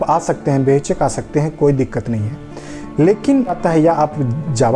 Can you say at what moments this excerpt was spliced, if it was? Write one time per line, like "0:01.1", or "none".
0:03.6